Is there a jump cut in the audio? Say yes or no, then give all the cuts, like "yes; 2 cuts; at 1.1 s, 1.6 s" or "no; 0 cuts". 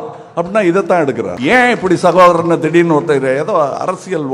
yes; 1 cut; at 1.3 s